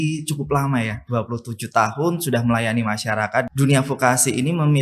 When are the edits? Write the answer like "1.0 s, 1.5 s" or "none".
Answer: 3.5 s